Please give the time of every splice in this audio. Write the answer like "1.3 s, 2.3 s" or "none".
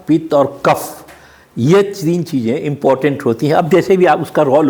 none